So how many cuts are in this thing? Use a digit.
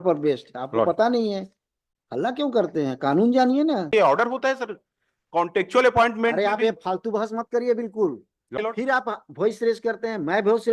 2